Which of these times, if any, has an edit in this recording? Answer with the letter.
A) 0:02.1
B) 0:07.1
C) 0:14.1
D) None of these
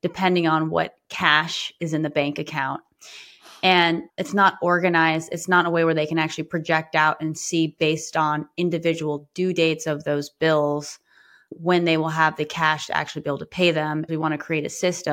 C